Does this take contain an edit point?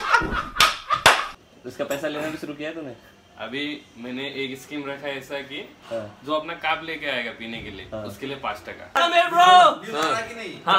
yes; 2 cuts; at 1.4 s, 9.0 s

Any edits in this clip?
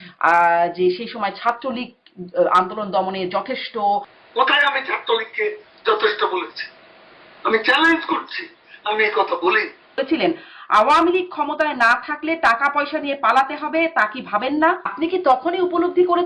yes; 3 cuts; at 4.2 s, 9.9 s, 14.9 s

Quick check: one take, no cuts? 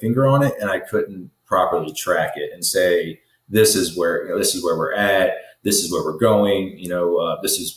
yes; 0 cuts

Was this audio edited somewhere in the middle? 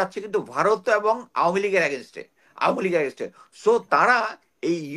no; 0 cuts

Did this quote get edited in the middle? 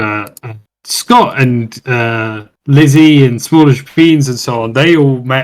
no; 0 cuts

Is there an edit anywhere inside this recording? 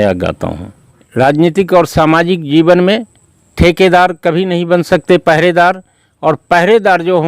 yes; 1 cut; at 1.0 s

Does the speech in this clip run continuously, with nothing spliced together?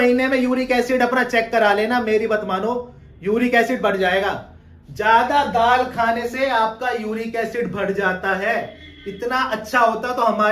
yes; 0 cuts

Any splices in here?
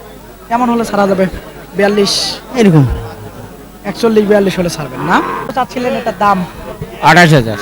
yes; 1 cut; at 5.4 s

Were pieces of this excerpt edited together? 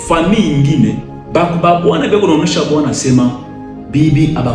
yes; 1 cut; at 1.1 s

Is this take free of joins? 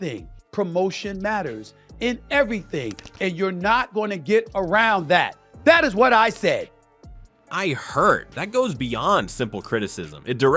yes; 0 cuts

